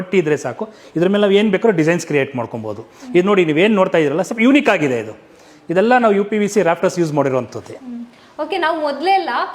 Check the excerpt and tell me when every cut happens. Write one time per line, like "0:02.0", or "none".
none

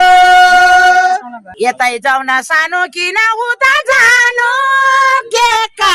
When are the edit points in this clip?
0:01.4

